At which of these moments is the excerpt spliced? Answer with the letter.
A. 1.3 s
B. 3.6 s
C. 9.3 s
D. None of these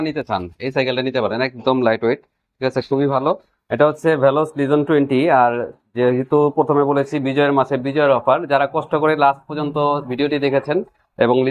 B